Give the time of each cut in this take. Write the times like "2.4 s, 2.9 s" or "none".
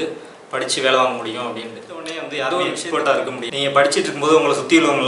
2.4 s, 3.5 s